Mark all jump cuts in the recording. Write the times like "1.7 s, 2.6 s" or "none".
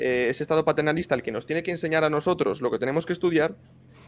none